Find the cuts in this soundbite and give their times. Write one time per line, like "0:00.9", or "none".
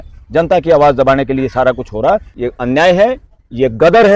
0:02.3